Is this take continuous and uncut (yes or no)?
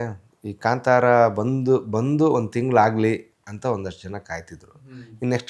yes